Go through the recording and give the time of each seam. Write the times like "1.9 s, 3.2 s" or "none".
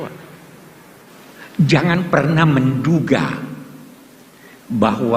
1.1 s

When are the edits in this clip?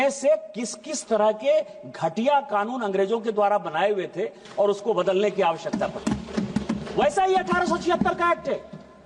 none

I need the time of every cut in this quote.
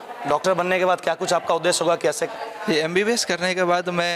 2.2 s

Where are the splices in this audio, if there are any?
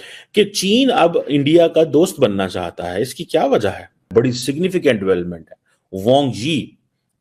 none

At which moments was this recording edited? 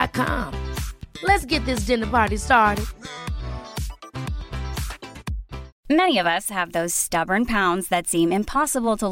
5.7 s

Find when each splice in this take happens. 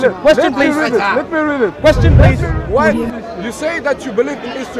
2.5 s

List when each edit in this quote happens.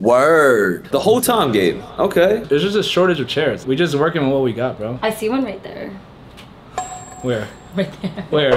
0.8 s, 2.4 s, 3.6 s

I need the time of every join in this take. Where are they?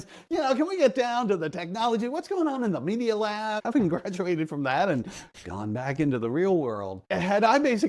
3.6 s, 6.9 s

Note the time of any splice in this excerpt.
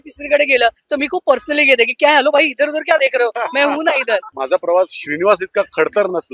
4.3 s

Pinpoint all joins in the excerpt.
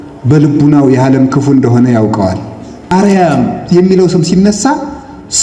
2.9 s

